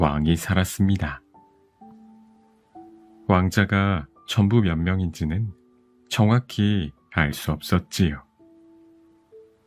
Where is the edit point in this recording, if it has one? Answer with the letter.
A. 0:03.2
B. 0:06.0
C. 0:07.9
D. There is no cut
D